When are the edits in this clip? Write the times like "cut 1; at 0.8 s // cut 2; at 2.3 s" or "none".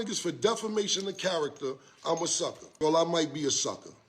cut 1; at 2.6 s

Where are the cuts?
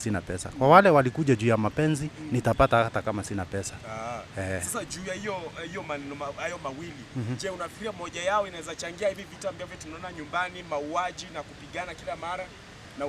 none

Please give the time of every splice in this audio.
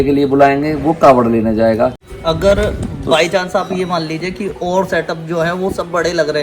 cut 1; at 2.1 s

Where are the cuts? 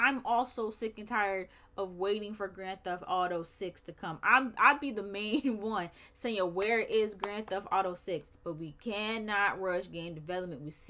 cut 1; at 8.3 s

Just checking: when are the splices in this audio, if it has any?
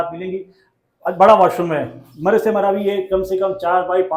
none

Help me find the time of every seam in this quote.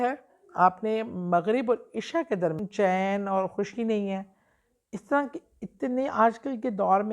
cut 1; at 2.6 s

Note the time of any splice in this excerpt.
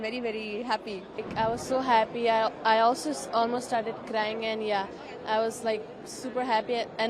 cut 1; at 1.2 s

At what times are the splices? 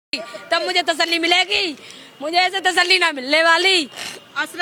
none

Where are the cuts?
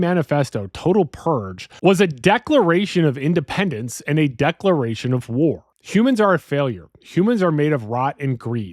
cut 1; at 1.7 s // cut 2; at 5.7 s

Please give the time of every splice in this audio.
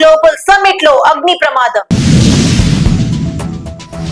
none

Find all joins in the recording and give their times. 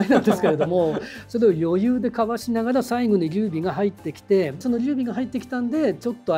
none

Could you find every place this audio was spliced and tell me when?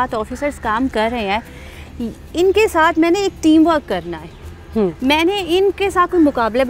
none

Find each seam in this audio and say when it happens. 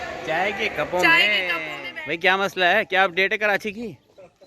cut 1; at 1.7 s

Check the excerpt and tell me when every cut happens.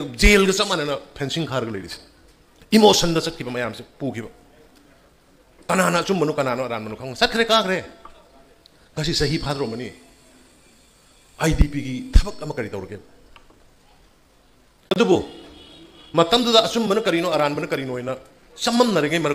cut 1; at 15.0 s

